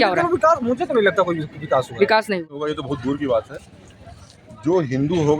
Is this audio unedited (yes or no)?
no